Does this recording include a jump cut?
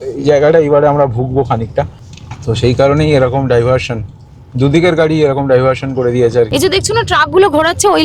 yes; 2 cuts; at 1.9 s, 6.5 s

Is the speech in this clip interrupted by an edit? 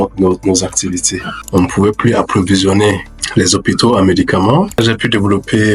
yes; 2 cuts; at 1.4 s, 4.8 s

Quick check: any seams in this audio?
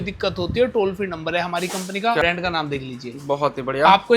yes; 1 cut; at 2.2 s

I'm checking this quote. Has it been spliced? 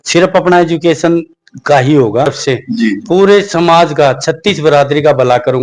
yes; 1 cut; at 2.4 s

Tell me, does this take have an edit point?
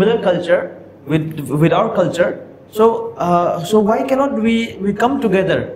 no; 0 cuts

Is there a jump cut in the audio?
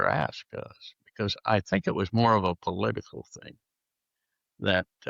no; 0 cuts

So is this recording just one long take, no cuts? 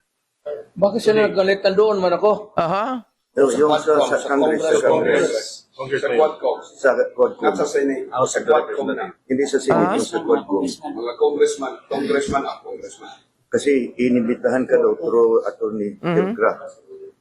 no; 1 cut; at 4.2 s

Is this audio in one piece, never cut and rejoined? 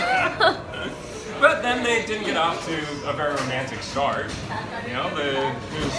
yes; 0 cuts

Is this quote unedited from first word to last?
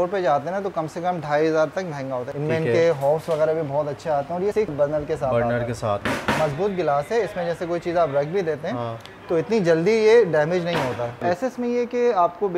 no; 4 cuts; at 2.3 s, 4.7 s, 6.0 s, 11.2 s

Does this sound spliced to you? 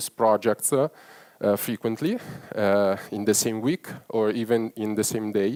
no; 0 cuts

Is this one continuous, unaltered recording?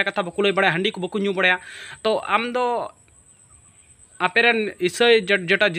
yes; 0 cuts

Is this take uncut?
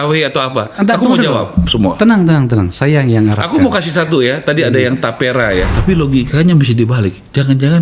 no; 1 cut; at 5.7 s

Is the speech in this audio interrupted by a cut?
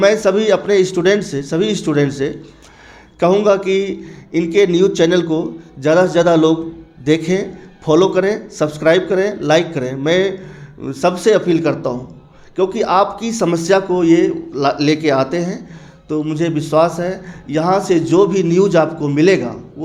no; 0 cuts

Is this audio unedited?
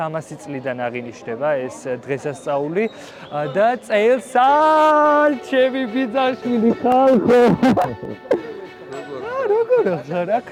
yes; 0 cuts

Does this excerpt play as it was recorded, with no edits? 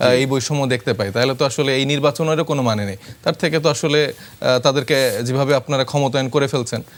yes; 0 cuts

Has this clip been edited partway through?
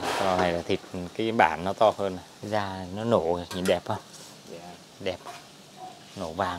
yes; 1 cut; at 2.3 s

